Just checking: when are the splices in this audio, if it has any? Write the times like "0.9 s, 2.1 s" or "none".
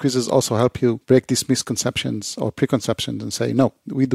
1.0 s